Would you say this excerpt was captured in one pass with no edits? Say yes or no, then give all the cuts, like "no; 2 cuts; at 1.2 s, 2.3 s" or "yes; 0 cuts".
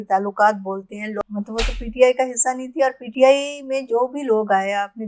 no; 1 cut; at 1.2 s